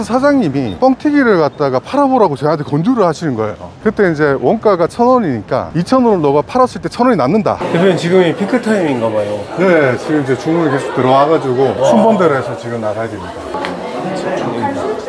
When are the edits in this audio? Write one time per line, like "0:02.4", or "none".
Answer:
0:03.7
0:07.6
0:13.5